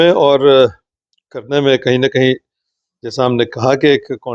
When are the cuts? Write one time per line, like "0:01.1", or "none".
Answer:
none